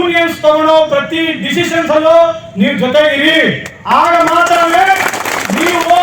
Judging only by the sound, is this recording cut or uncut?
uncut